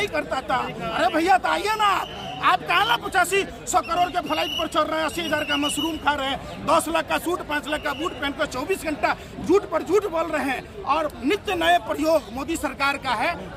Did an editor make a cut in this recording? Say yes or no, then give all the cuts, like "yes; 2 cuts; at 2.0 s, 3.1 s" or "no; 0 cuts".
no; 0 cuts